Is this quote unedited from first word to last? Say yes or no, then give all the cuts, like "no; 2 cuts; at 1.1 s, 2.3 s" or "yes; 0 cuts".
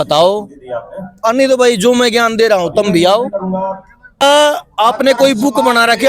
no; 1 cut; at 4.2 s